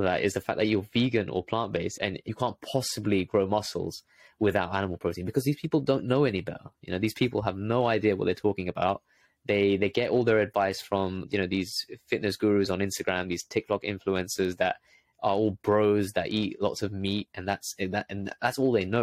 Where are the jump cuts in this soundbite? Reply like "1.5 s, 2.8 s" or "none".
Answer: 2.1 s